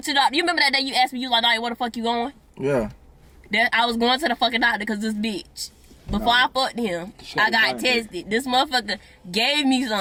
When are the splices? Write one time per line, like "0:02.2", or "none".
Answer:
none